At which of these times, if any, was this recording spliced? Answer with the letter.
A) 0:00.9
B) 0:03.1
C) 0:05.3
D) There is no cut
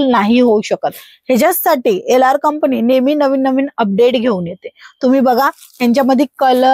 D